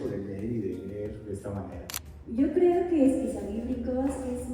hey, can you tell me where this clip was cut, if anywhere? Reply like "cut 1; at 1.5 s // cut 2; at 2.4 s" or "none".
cut 1; at 1.8 s

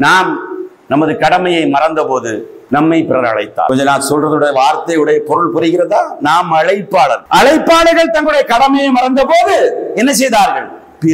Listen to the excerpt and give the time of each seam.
cut 1; at 2.5 s // cut 2; at 3.7 s // cut 3; at 7.2 s

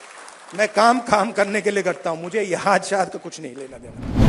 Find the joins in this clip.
none

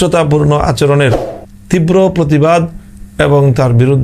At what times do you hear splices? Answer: none

